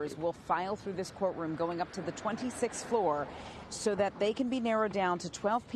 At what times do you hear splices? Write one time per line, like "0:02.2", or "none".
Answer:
0:03.2